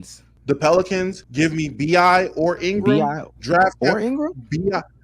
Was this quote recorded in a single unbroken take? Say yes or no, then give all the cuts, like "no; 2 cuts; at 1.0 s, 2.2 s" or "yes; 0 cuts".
no; 2 cuts; at 1.2 s, 2.6 s